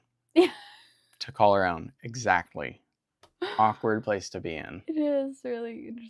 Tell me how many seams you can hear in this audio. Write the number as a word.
zero